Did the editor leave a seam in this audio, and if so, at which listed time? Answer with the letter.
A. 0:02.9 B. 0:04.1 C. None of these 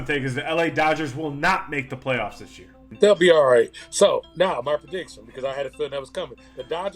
A